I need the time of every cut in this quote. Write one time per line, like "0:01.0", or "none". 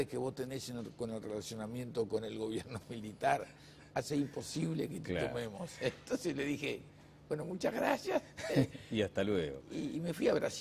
0:05.2